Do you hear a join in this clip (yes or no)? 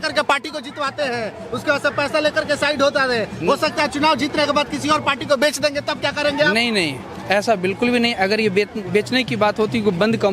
no